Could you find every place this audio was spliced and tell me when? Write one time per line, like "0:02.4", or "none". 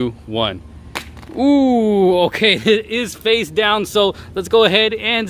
none